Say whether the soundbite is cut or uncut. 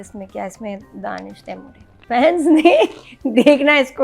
cut